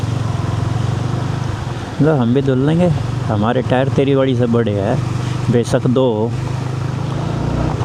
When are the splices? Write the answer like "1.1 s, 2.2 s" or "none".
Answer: none